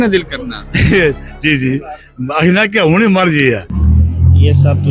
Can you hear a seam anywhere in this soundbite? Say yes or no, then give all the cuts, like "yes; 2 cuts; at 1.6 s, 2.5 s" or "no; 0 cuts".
yes; 1 cut; at 3.7 s